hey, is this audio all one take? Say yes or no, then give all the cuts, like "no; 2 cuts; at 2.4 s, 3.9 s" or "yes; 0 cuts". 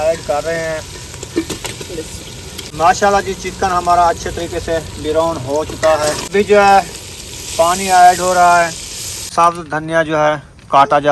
no; 3 cuts; at 2.6 s, 6.3 s, 9.3 s